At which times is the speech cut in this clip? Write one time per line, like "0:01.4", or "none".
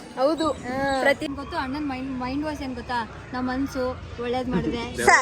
0:01.3